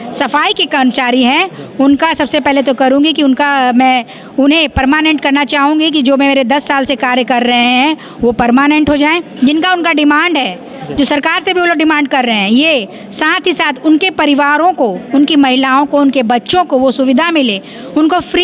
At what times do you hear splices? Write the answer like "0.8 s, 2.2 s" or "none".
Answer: none